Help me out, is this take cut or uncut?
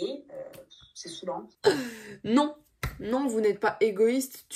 cut